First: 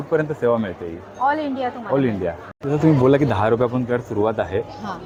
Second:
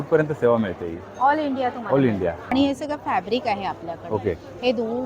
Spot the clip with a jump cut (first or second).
second